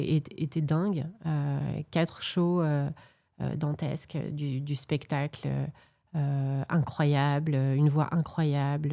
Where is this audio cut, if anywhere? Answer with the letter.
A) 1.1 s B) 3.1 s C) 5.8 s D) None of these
D